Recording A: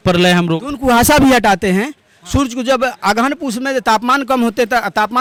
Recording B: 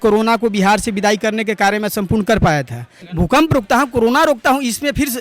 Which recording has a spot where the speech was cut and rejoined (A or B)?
B